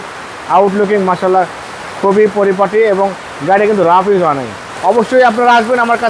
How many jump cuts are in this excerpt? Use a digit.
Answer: 1